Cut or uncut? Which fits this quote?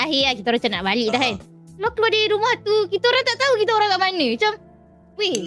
uncut